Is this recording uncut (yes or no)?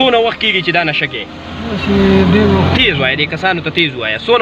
yes